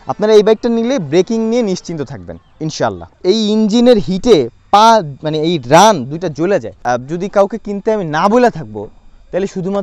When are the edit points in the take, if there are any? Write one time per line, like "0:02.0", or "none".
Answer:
0:03.1
0:06.8